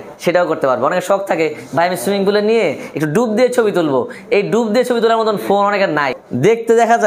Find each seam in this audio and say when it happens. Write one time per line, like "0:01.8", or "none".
0:06.1